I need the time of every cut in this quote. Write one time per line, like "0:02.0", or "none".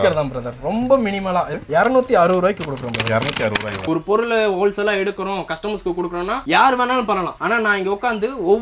0:01.5
0:03.8
0:07.3